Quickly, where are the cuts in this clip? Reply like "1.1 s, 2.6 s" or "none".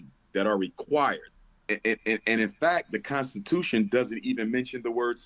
1.6 s